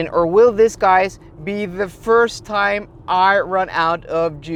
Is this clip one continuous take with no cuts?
yes; 0 cuts

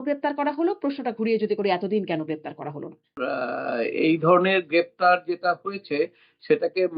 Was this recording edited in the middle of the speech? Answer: yes; 1 cut; at 3.2 s

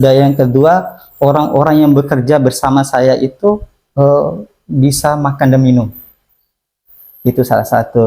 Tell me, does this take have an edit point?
no; 0 cuts

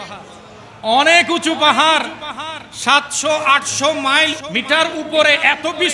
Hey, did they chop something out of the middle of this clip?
yes; 1 cut; at 4.4 s

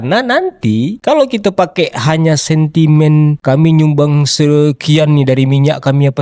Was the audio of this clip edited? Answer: no; 0 cuts

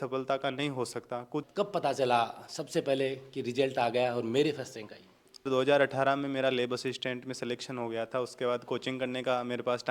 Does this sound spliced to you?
yes; 2 cuts; at 1.5 s, 5.5 s

